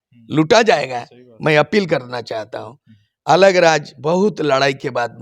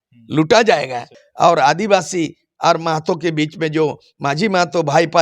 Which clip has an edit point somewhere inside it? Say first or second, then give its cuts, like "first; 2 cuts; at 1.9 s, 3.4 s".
second; 1 cut; at 1.2 s